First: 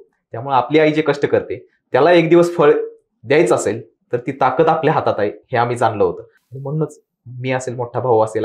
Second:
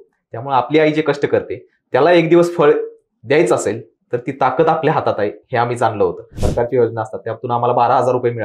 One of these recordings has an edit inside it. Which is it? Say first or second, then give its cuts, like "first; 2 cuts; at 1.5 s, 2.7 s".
second; 1 cut; at 6.4 s